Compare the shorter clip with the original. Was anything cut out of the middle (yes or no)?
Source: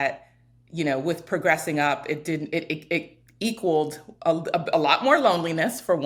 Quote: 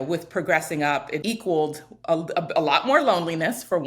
yes